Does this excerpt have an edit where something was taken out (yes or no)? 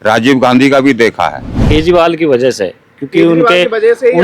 yes